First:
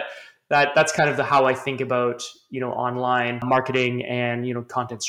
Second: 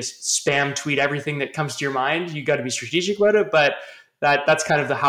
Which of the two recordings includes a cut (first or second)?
first